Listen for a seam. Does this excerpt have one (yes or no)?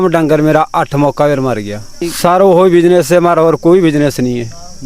yes